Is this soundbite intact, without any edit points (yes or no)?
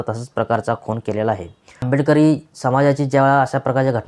no